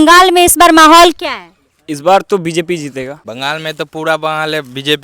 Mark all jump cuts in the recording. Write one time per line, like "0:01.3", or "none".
0:03.2

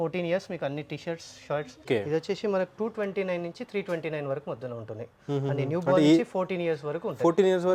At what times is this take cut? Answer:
0:01.9

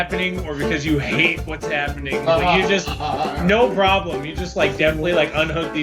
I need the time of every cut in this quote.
none

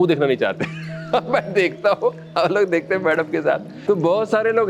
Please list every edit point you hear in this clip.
0:03.7

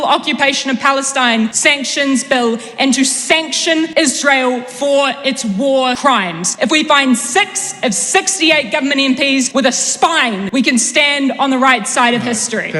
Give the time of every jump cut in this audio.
0:01.6
0:03.9
0:06.2
0:09.5
0:10.4

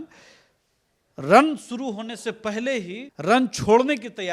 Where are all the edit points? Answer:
0:03.0

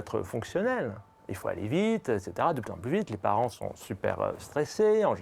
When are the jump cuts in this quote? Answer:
none

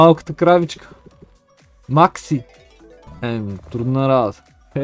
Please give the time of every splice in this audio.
none

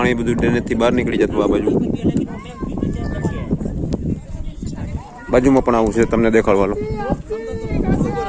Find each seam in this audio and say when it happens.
none

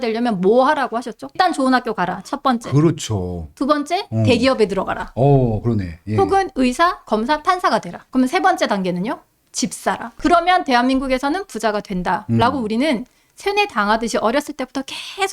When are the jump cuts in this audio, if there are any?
0:01.3

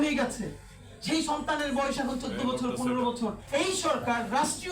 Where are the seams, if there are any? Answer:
0:03.4

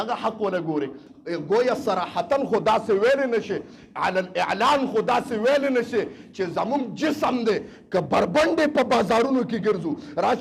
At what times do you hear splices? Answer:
0:01.1

